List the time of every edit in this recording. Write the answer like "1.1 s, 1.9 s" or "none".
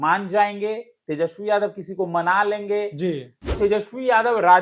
3.5 s